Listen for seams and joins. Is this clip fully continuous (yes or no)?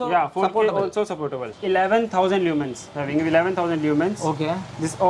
no